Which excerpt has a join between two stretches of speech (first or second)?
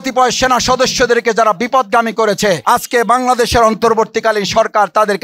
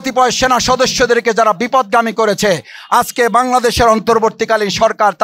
first